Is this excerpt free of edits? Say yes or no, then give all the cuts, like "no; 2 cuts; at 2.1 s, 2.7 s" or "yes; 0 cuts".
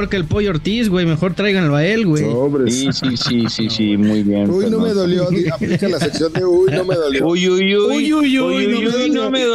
yes; 0 cuts